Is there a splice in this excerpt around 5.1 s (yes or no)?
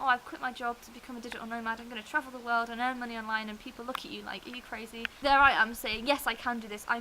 yes